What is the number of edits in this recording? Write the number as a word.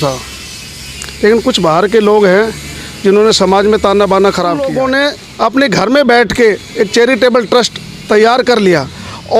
one